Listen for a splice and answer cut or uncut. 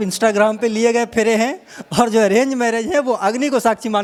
uncut